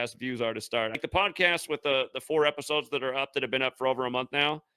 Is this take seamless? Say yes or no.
no